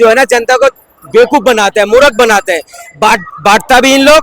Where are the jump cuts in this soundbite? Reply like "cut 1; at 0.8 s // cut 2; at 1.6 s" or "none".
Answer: none